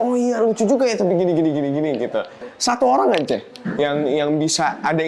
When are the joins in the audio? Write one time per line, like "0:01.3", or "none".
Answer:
0:02.4